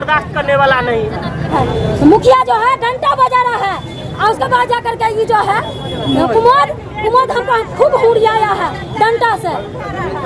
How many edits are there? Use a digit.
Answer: 1